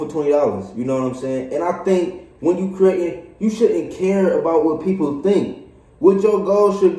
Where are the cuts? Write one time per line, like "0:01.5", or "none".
none